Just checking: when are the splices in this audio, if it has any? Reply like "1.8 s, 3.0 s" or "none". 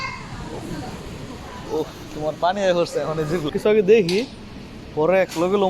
3.5 s